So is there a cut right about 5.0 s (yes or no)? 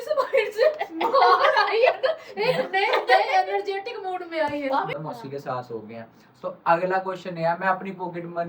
yes